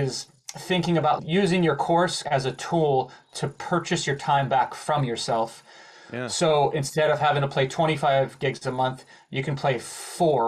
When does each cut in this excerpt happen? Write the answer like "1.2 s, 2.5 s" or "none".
1.2 s, 2.2 s